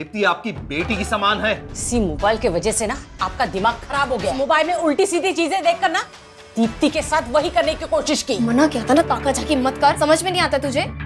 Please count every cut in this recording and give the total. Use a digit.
4